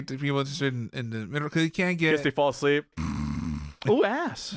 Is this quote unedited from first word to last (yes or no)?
no